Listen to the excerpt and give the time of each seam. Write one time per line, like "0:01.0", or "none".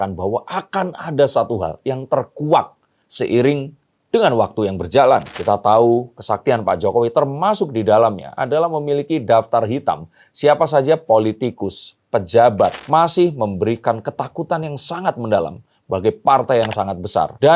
0:05.3
0:12.7